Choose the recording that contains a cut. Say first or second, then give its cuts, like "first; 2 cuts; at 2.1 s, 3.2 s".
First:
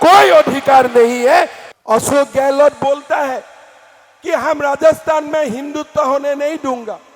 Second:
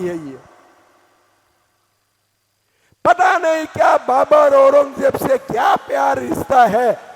first; 1 cut; at 1.6 s